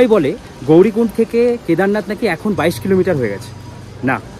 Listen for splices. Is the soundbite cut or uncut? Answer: uncut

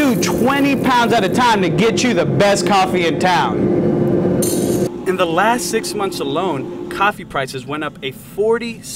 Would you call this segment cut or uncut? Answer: uncut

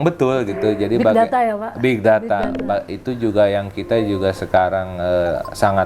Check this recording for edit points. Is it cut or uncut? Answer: uncut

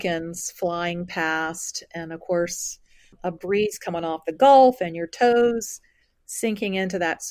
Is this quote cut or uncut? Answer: cut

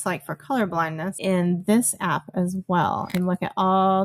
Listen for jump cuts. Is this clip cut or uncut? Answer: cut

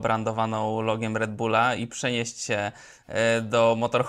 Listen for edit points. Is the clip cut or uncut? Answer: uncut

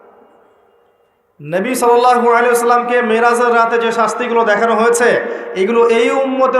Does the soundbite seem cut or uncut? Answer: uncut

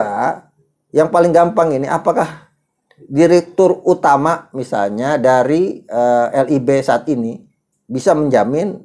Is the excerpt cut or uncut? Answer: uncut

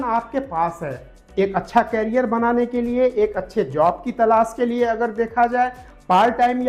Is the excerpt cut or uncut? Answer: uncut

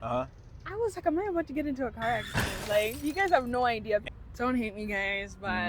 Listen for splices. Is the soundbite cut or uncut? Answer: cut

